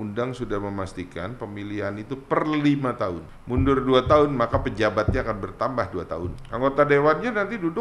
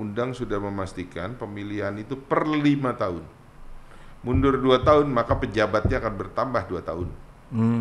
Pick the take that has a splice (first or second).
first